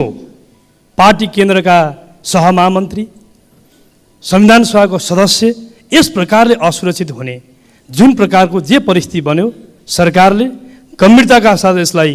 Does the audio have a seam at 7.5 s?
no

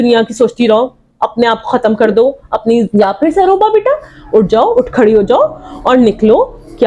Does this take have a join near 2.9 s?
yes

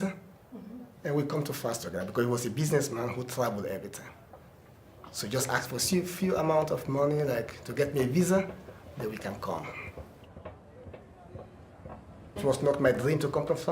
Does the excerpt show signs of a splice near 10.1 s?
no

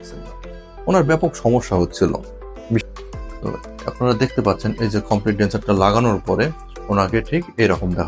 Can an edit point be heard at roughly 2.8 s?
yes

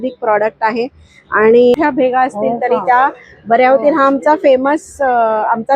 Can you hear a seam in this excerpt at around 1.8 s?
yes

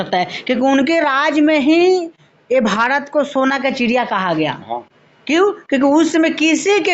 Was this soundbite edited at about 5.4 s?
no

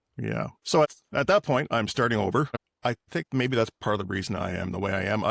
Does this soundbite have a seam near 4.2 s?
no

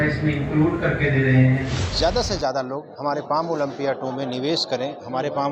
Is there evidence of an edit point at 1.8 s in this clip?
yes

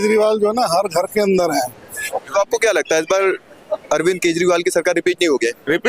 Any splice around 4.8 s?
no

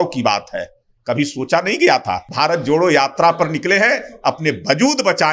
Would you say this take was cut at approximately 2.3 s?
yes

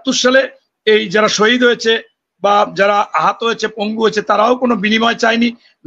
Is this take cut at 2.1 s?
no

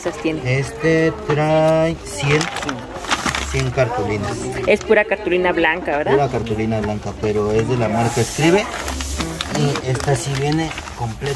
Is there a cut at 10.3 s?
no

